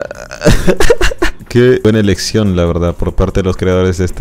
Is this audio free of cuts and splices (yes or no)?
no